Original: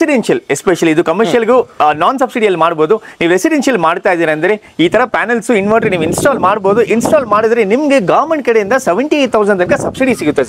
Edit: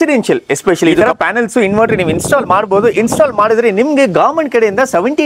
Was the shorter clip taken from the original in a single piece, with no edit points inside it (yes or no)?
no